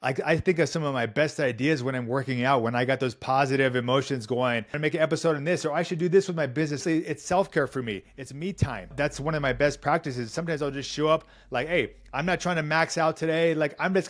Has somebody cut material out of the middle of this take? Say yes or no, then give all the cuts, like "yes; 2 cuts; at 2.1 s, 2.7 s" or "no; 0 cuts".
yes; 3 cuts; at 4.7 s, 6.8 s, 8.9 s